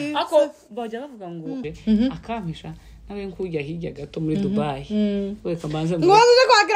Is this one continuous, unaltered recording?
no; 1 cut; at 1.6 s

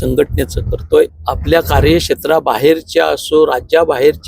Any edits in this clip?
yes; 1 cut; at 1.3 s

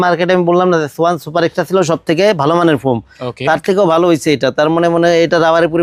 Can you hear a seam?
no; 0 cuts

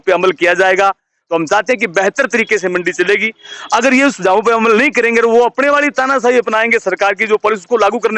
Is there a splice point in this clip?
no; 0 cuts

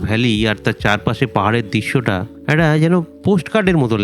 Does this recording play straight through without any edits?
no; 2 cuts; at 2.3 s, 3.1 s

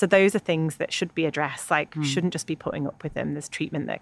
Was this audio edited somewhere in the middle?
no; 0 cuts

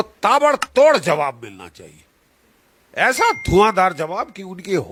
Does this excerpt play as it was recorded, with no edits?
yes; 0 cuts

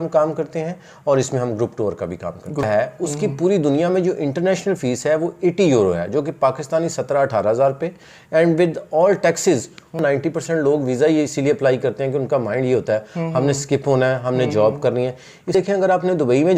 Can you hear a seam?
yes; 3 cuts; at 2.6 s, 10.0 s, 15.5 s

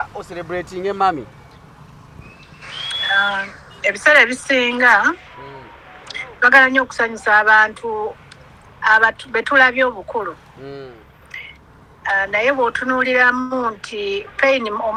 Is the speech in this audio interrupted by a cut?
no; 0 cuts

